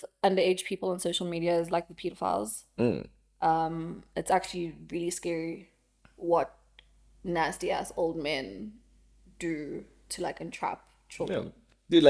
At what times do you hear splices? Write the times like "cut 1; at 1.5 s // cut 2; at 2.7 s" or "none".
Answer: none